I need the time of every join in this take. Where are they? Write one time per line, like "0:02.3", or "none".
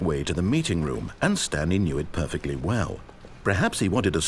none